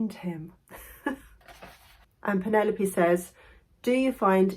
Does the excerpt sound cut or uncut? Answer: cut